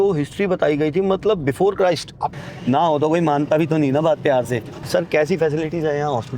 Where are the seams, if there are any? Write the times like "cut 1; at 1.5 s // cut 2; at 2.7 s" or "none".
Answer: cut 1; at 2.3 s // cut 2; at 4.7 s